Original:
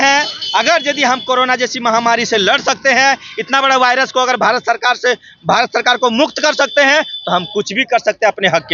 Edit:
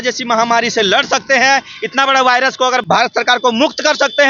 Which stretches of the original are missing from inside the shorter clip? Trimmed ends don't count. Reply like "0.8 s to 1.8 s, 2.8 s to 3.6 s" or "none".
4.4 s to 5.4 s